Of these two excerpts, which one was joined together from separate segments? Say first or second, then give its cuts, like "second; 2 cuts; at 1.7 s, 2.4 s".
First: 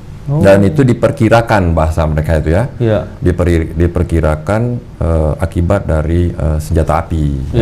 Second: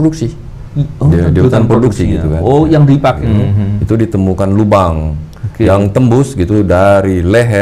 second; 1 cut; at 3.2 s